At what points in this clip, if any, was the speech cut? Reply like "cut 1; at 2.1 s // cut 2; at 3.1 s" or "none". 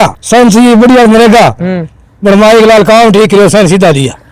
none

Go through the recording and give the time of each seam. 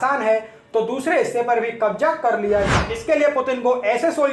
cut 1; at 2.7 s

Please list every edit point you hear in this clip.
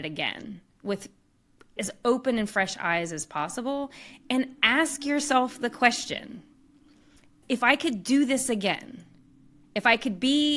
cut 1; at 1.8 s // cut 2; at 7.4 s

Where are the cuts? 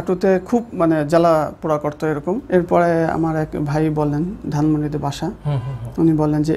cut 1; at 2.4 s

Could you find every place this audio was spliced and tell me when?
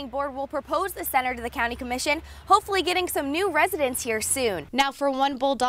cut 1; at 4.7 s

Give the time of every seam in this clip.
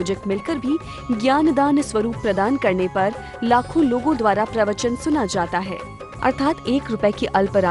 none

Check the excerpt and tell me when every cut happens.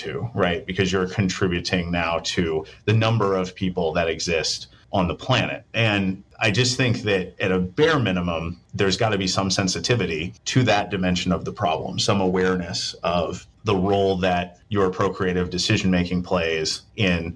none

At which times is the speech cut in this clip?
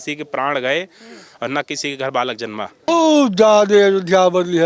cut 1; at 2.8 s

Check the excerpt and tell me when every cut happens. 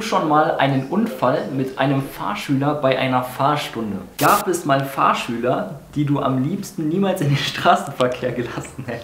cut 1; at 4.1 s

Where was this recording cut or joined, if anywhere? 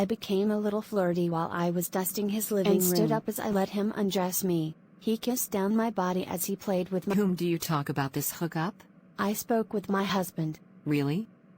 cut 1; at 3.0 s // cut 2; at 7.1 s

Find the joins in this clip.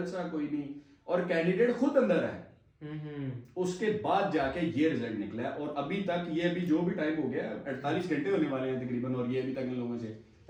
none

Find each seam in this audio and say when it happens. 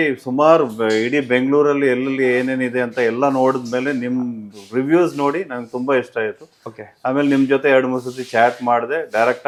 none

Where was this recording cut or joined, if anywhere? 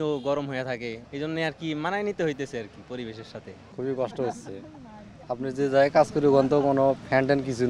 cut 1; at 1.0 s // cut 2; at 3.6 s

